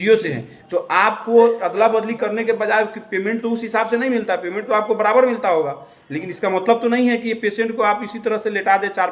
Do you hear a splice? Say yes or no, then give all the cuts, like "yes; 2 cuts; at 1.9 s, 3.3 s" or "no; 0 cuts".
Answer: no; 0 cuts